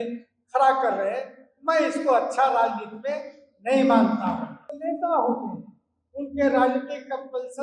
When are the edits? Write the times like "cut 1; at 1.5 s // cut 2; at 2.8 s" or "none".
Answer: cut 1; at 4.8 s